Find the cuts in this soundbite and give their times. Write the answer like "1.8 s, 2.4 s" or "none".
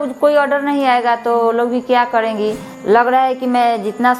2.7 s